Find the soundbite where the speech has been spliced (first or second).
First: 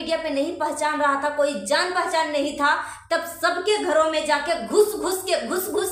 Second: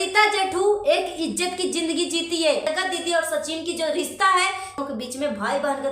second